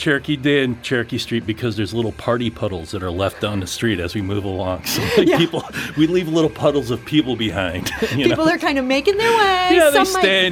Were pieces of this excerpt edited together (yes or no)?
no